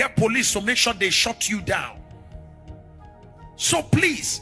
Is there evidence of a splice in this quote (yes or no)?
no